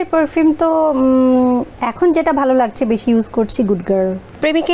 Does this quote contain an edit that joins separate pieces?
no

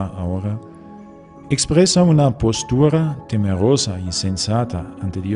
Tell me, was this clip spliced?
no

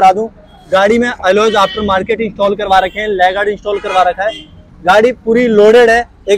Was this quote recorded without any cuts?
yes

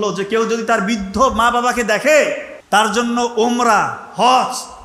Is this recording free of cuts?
no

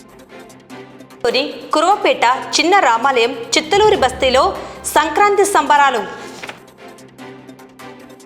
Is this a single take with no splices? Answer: yes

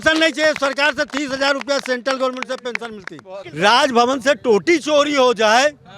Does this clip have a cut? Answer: yes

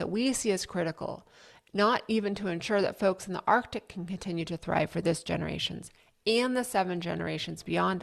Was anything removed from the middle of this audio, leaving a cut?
no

